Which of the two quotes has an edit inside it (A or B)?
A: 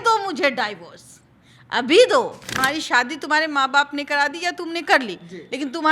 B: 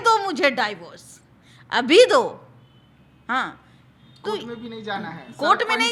A